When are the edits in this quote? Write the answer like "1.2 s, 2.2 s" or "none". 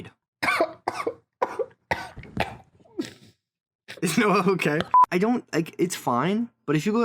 5.0 s